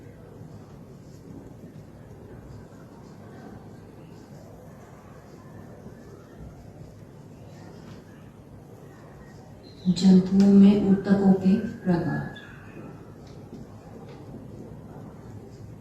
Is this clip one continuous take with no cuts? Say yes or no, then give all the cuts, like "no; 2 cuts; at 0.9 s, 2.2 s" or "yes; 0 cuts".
no; 1 cut; at 4.5 s